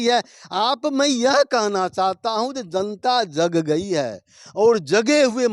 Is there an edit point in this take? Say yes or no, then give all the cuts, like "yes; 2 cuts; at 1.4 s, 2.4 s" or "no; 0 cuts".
no; 0 cuts